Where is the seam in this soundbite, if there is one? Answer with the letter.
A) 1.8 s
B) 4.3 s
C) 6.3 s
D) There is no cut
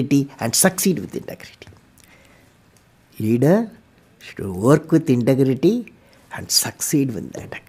D